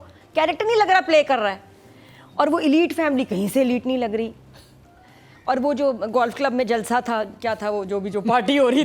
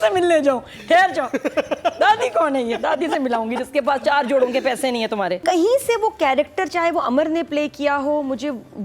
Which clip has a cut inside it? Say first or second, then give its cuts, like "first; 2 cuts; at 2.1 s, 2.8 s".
second; 1 cut; at 5.4 s